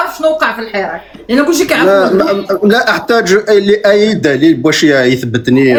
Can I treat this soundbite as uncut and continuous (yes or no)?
yes